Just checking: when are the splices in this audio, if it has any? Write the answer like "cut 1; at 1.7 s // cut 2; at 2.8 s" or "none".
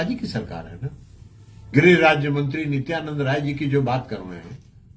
cut 1; at 1.5 s